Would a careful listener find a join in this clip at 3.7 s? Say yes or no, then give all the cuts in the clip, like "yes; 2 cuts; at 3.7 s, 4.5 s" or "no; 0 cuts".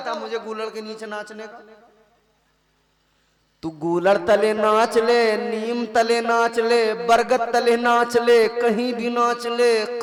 no; 0 cuts